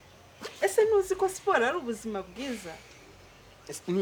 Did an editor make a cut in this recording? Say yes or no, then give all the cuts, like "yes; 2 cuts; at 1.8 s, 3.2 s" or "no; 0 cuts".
no; 0 cuts